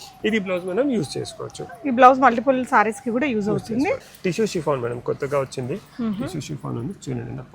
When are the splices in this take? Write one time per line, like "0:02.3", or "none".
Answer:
0:04.1